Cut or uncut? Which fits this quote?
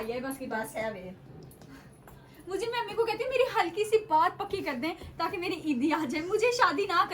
uncut